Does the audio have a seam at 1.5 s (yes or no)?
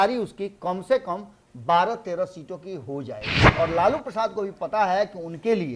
no